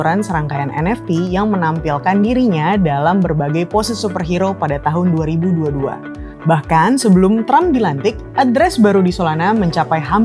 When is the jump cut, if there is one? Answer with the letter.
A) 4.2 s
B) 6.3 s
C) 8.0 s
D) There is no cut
B